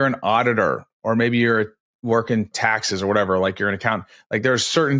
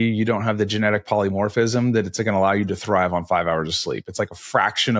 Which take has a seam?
first; 1 cut; at 2.5 s

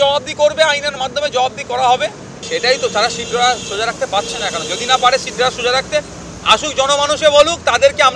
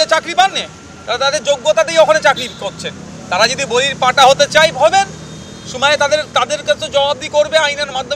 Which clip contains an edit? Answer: first; 1 cut; at 2.3 s

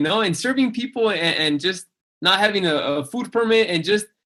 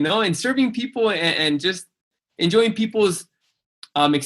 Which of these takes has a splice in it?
second; 1 cut; at 2.1 s

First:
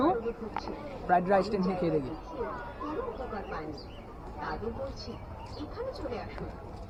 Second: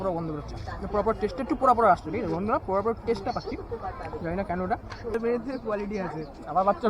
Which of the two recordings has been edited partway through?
second; 1 cut; at 5.1 s

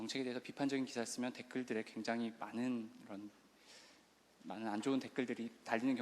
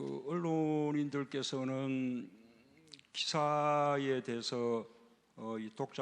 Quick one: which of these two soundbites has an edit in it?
first; 1 cut; at 4.2 s

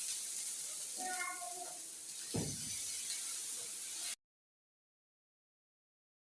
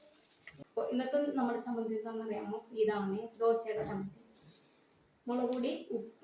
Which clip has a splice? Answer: first; 1 cut; at 3.7 s

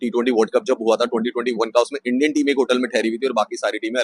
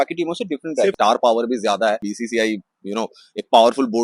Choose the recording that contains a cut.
second; 2 cuts; at 0.9 s, 2.1 s

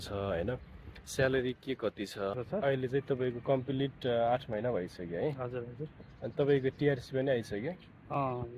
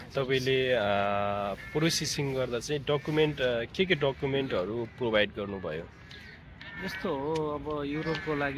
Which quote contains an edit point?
first; 1 cut; at 2.4 s

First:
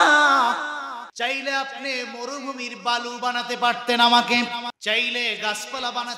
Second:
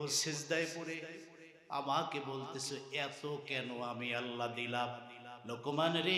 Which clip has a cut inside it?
first; 2 cuts; at 1.0 s, 4.8 s

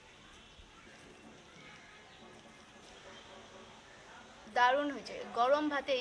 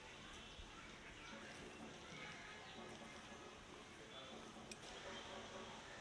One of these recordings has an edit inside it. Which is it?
first; 3 cuts; at 0.8 s, 2.8 s, 4.5 s

